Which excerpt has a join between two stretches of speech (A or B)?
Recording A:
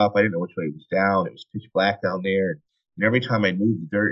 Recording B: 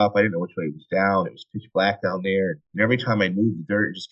B